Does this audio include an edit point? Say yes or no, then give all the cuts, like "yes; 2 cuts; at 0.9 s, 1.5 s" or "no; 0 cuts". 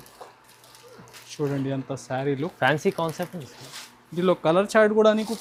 no; 0 cuts